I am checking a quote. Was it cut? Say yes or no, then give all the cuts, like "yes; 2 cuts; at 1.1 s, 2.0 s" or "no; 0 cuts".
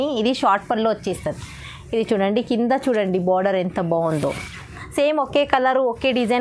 yes; 1 cut; at 4.8 s